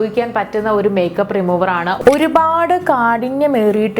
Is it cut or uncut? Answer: cut